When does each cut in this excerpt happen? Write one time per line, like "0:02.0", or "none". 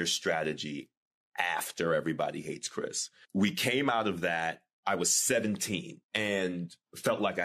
0:03.2
0:06.0